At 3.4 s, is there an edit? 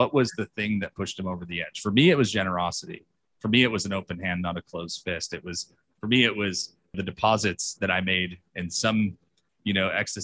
no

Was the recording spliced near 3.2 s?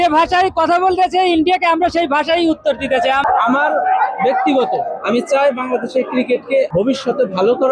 yes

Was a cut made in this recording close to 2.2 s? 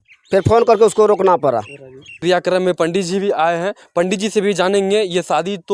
yes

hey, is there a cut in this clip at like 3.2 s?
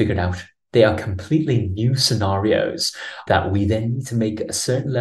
yes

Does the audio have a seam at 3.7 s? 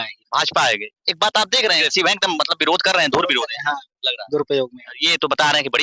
no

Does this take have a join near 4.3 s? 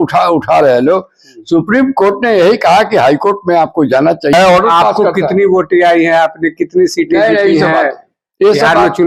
yes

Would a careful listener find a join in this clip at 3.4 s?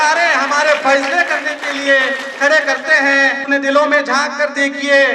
yes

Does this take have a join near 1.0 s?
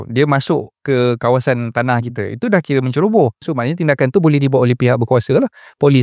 no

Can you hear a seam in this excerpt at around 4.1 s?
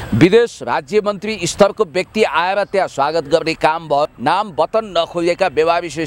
yes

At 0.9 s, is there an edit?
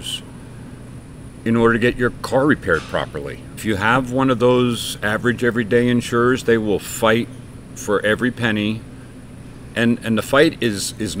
no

